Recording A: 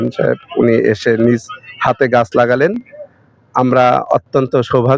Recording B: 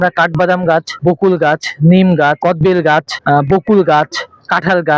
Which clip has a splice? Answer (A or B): B